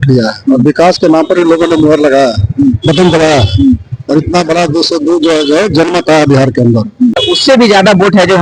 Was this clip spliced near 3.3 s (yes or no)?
no